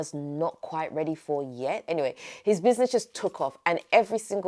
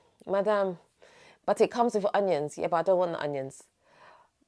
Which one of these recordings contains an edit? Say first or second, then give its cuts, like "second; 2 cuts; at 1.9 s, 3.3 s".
first; 1 cut; at 1.9 s